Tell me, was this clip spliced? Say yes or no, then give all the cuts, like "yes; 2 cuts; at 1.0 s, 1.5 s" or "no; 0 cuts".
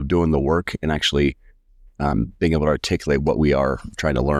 no; 0 cuts